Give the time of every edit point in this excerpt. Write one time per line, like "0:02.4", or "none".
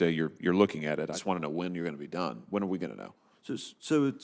0:01.2